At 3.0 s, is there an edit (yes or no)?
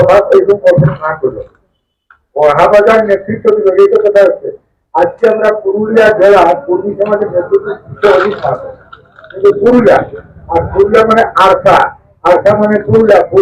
no